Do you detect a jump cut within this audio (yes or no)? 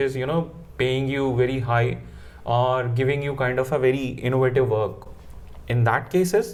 no